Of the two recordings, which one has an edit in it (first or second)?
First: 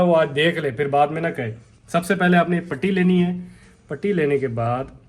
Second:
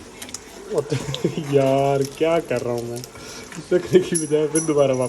second